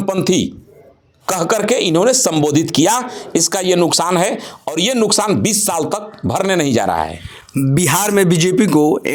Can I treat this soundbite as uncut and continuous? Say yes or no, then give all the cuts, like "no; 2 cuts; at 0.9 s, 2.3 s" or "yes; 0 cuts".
yes; 0 cuts